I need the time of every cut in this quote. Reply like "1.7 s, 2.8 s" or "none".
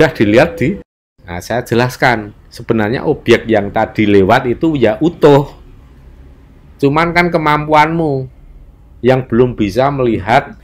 0.9 s